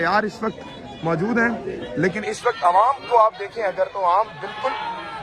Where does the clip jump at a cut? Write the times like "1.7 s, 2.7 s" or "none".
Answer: none